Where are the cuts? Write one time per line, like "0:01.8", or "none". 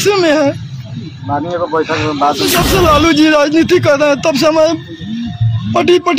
0:02.6